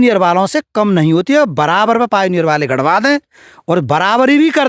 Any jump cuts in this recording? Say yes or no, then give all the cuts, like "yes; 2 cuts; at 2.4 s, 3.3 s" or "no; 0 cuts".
no; 0 cuts